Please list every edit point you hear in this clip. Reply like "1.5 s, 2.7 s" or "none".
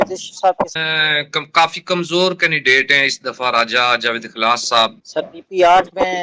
0.7 s, 5.0 s